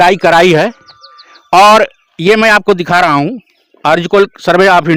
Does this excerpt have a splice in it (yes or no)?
no